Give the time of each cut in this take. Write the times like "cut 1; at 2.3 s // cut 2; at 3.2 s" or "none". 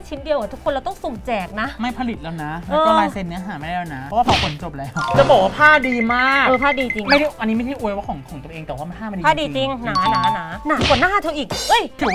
none